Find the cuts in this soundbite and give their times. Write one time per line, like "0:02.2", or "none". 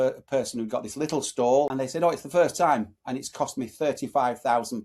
0:01.7